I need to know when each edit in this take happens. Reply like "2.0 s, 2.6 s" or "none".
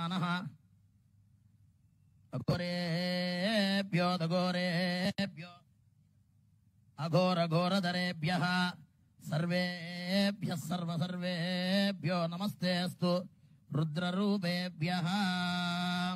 none

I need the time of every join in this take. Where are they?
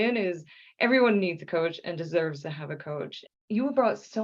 3.2 s

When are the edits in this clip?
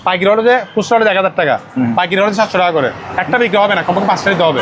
none

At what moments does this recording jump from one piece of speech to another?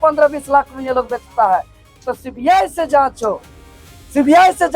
2.0 s

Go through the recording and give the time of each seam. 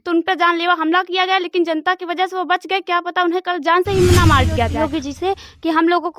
4.8 s

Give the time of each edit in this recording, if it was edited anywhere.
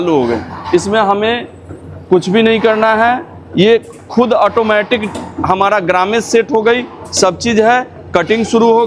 none

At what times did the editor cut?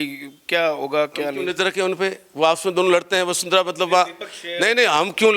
none

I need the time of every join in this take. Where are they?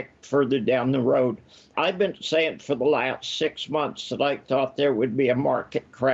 1.7 s

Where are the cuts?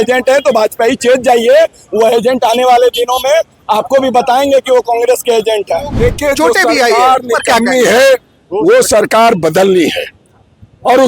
5.9 s

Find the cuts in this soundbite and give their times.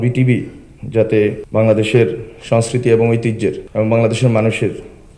1.4 s, 3.6 s

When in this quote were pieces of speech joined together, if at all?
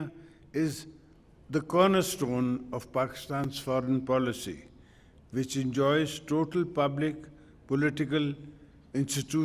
none

